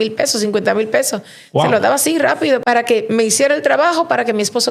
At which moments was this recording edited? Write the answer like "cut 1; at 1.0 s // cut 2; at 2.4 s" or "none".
cut 1; at 2.6 s